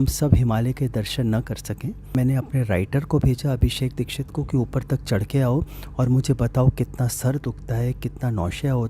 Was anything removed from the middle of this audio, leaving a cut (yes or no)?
yes